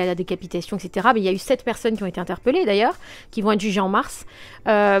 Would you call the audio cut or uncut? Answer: uncut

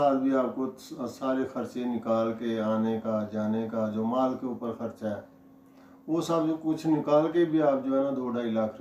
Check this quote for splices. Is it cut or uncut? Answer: uncut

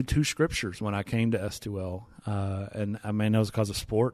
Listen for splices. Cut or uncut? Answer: uncut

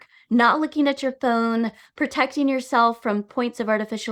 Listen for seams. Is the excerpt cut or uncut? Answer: uncut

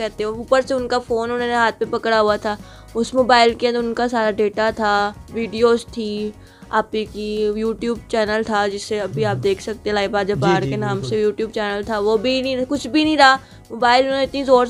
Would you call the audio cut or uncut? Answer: uncut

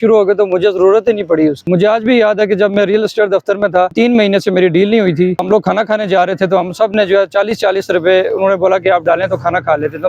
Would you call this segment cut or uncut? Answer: cut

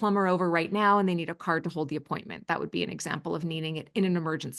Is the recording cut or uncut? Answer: uncut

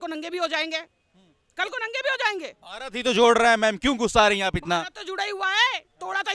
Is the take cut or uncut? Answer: uncut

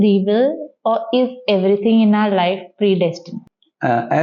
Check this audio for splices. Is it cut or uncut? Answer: cut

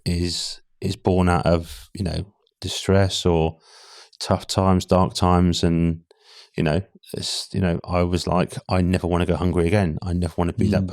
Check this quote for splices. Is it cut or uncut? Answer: uncut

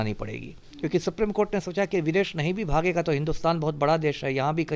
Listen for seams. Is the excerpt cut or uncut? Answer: uncut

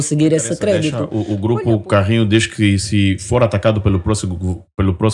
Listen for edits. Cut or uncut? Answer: cut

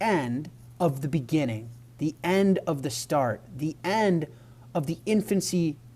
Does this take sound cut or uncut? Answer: uncut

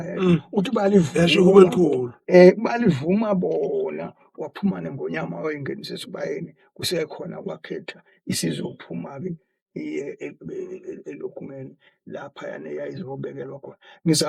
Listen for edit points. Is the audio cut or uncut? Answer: uncut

